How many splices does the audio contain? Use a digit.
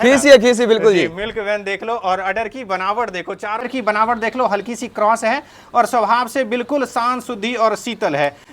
1